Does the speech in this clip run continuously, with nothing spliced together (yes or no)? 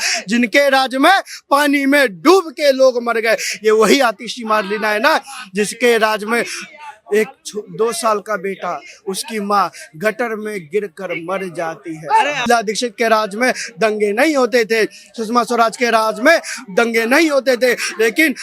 no